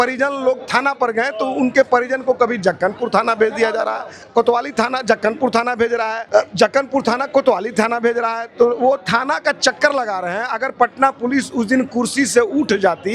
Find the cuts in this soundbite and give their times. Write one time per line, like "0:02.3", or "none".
0:04.1
0:06.2

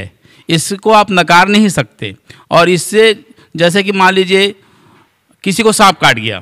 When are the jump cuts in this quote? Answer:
none

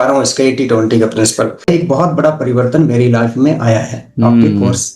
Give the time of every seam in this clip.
0:01.7

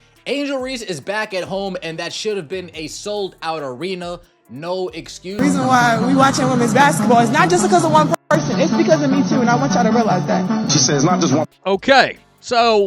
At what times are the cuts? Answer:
0:05.2

